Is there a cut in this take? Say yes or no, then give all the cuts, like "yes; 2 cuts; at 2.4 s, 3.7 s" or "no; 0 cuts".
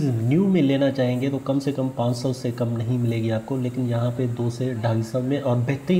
no; 0 cuts